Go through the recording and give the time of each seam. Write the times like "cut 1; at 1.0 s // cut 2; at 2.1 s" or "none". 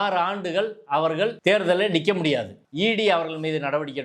cut 1; at 1.4 s // cut 2; at 2.6 s